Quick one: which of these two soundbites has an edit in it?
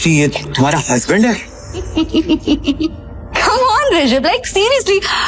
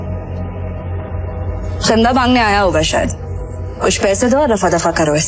first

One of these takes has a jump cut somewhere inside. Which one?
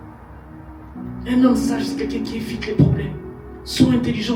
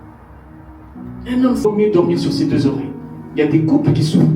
second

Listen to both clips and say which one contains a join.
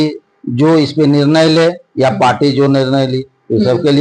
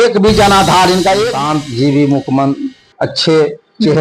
second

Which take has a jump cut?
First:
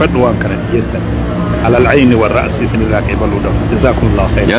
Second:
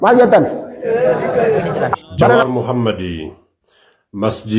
second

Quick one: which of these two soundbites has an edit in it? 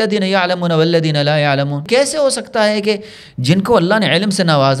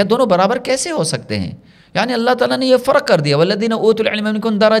first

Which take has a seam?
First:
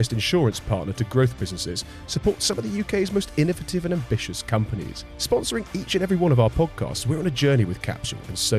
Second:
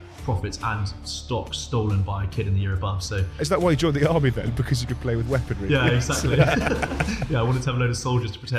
second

